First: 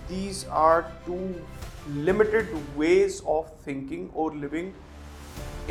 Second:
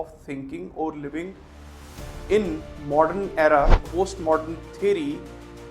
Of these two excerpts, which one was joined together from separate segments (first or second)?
second